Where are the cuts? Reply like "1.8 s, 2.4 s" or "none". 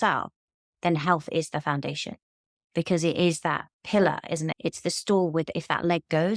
4.5 s

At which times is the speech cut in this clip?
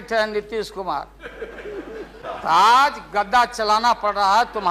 2.2 s

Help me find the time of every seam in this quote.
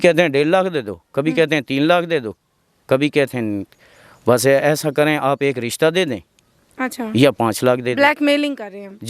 none

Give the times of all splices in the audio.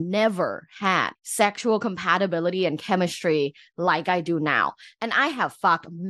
1.2 s

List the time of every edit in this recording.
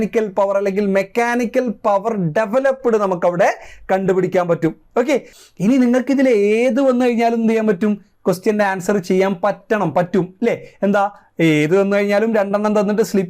5.3 s

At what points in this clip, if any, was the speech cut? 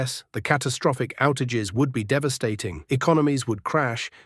2.7 s

